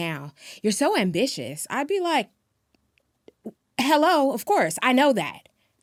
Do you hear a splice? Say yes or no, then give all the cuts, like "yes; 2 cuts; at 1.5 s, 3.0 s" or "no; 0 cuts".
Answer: no; 0 cuts